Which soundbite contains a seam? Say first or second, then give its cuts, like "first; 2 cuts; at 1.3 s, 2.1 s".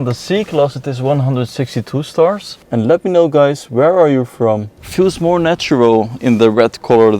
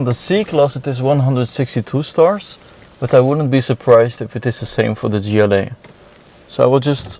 first; 2 cuts; at 2.5 s, 4.8 s